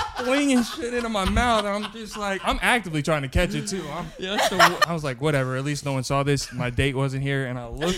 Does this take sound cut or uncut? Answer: cut